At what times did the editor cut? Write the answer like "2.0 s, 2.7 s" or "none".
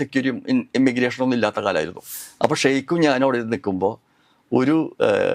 2.0 s